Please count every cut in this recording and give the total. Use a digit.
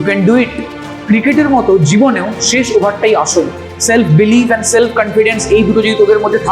2